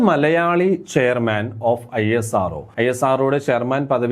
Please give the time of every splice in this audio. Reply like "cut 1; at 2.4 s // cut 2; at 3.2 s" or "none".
cut 1; at 2.6 s